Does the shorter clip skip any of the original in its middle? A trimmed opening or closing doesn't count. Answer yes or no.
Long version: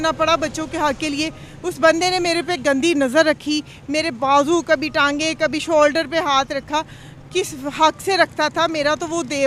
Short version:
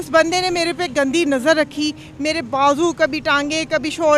no